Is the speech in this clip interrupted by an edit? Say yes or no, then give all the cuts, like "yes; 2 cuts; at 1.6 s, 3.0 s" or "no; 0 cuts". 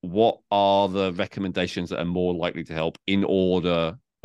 no; 0 cuts